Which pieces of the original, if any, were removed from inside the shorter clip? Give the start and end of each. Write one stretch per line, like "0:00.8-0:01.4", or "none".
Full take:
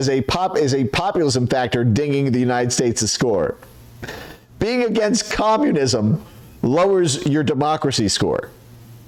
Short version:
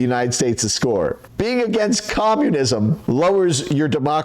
0:03.6-0:04.5
0:06.2-0:06.5